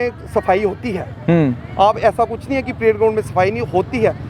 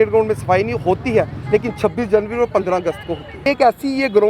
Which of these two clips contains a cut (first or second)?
second